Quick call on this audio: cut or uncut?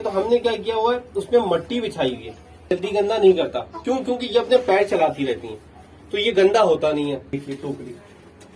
cut